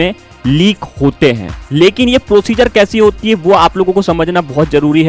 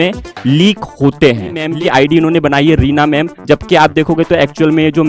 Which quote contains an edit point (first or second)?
second